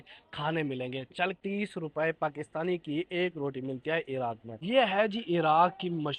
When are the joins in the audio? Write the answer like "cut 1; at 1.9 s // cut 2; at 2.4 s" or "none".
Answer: cut 1; at 1.4 s // cut 2; at 4.5 s

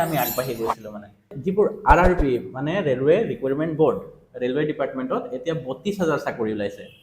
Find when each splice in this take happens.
cut 1; at 1.3 s

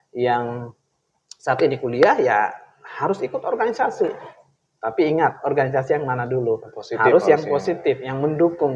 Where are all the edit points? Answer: none

